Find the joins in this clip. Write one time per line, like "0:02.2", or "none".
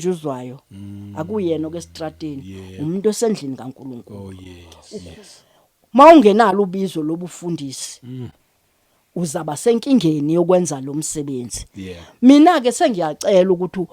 0:04.7